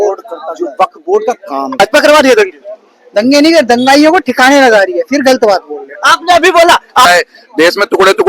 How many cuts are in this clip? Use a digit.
2